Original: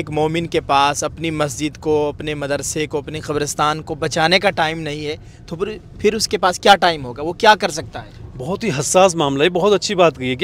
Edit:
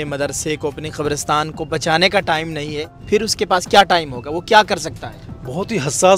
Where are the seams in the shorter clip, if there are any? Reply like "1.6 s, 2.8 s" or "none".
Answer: 2.9 s